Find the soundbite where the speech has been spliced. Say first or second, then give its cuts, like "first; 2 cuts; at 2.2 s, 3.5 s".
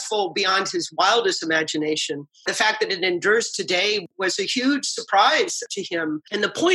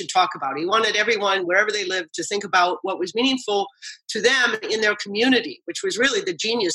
first; 3 cuts; at 2.5 s, 4.0 s, 5.8 s